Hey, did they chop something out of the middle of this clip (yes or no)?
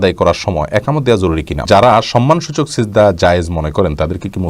yes